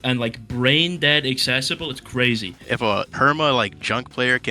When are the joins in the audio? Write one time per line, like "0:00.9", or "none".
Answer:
0:02.8